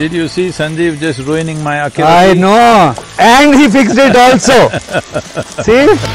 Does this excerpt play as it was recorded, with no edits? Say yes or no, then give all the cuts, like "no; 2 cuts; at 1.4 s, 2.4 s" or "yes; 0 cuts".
no; 1 cut; at 3.0 s